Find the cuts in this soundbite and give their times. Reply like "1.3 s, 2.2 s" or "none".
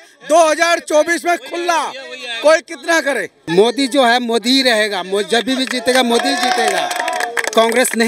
3.3 s

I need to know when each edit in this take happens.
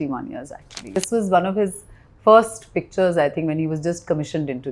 1.0 s

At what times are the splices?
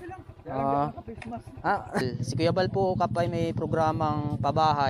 2.0 s

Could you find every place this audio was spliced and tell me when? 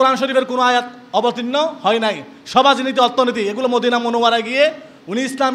none

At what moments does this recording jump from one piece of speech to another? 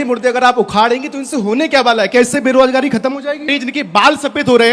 3.5 s

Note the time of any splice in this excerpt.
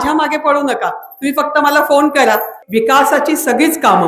2.6 s

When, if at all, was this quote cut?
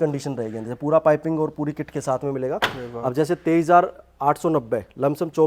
none

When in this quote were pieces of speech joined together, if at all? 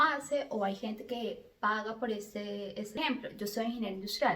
3.0 s

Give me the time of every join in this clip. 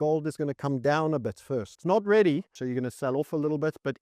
1.7 s, 2.5 s

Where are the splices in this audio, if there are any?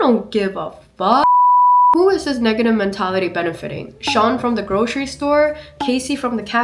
none

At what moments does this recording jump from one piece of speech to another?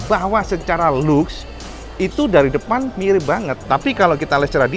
3.7 s

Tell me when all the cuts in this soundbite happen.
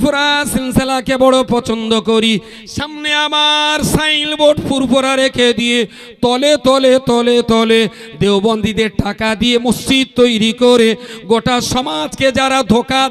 none

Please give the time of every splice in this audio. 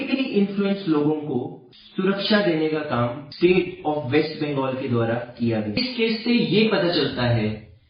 3.2 s, 5.8 s

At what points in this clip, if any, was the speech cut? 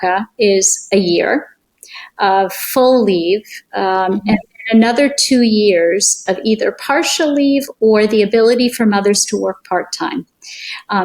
none

